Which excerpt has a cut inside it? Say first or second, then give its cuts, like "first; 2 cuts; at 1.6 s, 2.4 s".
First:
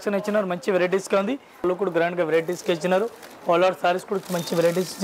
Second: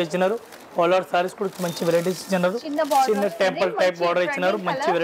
first; 1 cut; at 1.6 s